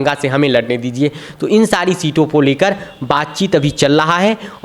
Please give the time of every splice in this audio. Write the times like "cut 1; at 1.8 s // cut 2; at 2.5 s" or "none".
none